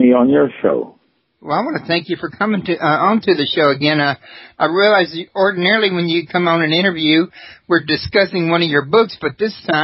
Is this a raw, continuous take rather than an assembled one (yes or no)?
yes